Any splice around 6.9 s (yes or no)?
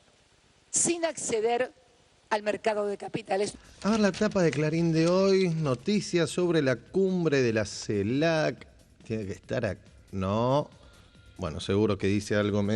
no